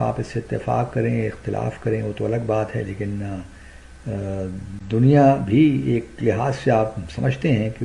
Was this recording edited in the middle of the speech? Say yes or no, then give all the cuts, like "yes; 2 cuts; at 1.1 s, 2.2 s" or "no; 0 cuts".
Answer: no; 0 cuts